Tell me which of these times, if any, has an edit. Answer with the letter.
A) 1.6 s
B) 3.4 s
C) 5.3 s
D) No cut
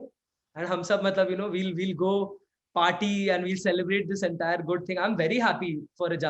D